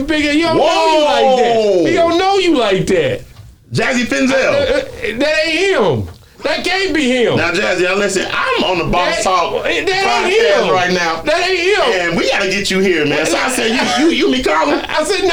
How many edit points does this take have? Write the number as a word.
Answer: zero